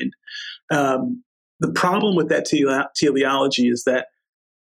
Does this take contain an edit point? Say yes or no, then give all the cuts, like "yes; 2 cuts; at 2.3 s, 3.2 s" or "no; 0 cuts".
yes; 1 cut; at 1.2 s